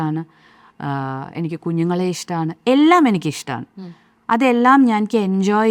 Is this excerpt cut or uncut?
uncut